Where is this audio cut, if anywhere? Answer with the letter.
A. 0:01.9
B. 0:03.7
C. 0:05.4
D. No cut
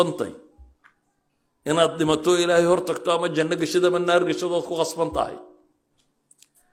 D